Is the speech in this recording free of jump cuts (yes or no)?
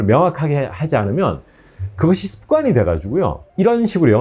yes